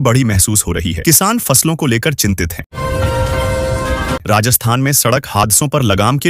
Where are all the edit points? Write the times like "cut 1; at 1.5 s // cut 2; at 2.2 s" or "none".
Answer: cut 1; at 2.7 s // cut 2; at 4.2 s